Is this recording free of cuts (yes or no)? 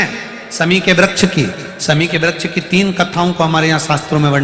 yes